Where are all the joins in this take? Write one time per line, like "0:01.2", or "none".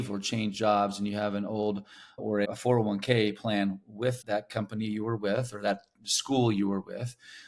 0:02.2
0:04.2

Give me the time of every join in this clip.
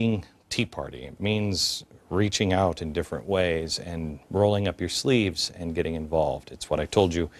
none

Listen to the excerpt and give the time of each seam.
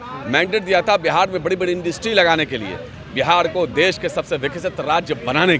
0:03.0

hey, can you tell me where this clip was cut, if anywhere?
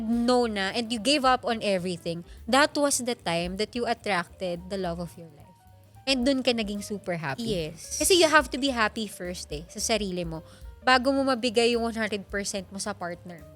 none

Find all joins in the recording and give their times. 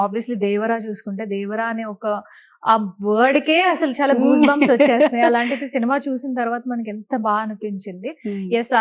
none

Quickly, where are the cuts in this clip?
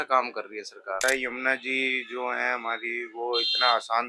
0:01.0

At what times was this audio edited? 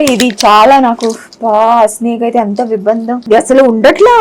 0:03.2

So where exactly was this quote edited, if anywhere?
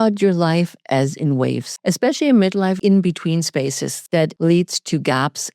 0:01.7
0:02.8
0:04.2

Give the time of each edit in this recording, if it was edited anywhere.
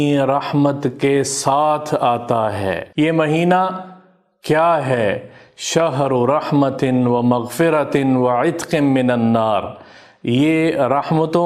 0:02.8

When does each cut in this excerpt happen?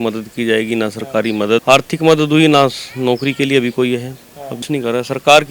0:01.6
0:04.6

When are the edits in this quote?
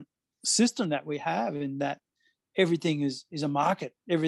none

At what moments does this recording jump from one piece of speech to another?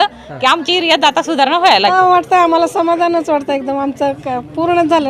0:01.9

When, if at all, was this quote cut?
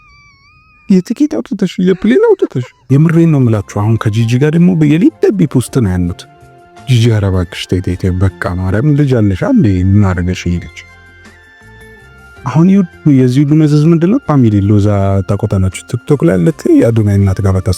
0:02.7

